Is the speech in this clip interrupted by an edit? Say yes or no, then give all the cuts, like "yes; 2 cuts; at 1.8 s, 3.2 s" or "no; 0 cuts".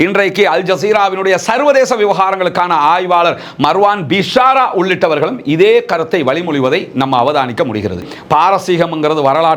yes; 1 cut; at 8.0 s